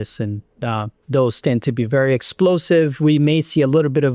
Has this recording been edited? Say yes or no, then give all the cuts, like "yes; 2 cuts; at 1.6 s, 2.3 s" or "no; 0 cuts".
no; 0 cuts